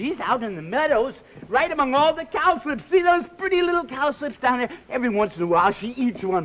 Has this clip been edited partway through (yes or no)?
no